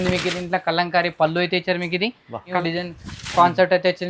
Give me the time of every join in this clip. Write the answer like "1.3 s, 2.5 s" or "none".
2.6 s